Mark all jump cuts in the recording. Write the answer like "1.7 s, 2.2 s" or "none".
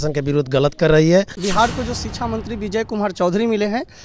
1.4 s